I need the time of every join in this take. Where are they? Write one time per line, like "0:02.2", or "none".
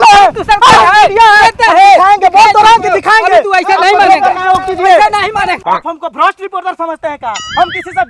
0:05.6